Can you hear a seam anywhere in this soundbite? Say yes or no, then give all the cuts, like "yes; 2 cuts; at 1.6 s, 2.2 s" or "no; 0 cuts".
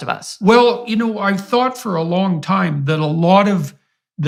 no; 0 cuts